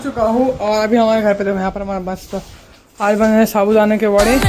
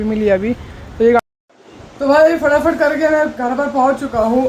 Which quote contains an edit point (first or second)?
second